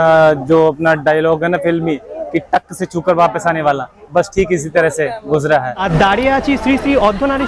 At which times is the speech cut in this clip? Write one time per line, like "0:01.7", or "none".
0:05.8